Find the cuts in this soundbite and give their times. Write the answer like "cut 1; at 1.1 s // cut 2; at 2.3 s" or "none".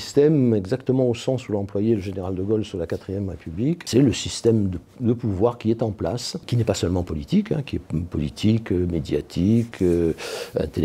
cut 1; at 3.8 s // cut 2; at 6.5 s